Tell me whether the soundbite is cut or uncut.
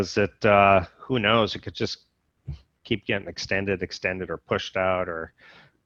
uncut